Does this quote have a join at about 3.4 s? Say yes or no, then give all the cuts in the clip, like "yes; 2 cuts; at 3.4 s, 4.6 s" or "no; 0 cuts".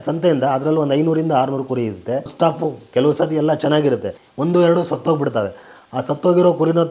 no; 0 cuts